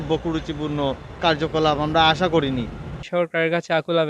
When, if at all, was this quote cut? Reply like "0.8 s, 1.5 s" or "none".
1.1 s, 3.0 s